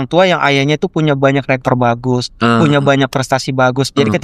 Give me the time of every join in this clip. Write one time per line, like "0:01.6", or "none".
none